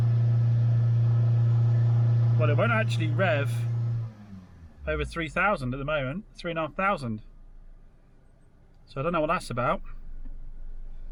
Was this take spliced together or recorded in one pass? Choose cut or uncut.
uncut